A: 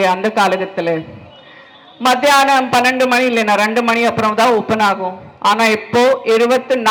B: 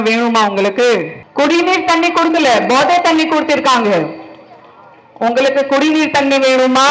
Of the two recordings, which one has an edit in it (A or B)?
B